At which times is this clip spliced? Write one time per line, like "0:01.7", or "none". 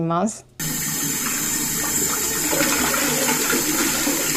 none